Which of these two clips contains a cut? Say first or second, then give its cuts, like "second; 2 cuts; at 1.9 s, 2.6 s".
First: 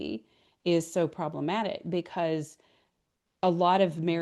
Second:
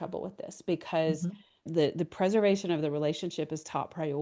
second; 1 cut; at 1.7 s